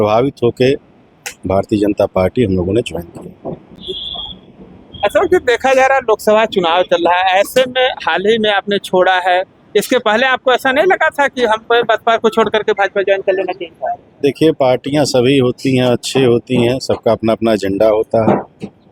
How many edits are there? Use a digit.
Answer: 0